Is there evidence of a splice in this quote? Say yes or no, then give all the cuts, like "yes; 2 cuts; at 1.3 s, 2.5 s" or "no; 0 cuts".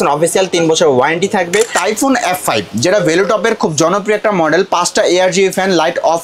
yes; 1 cut; at 1.7 s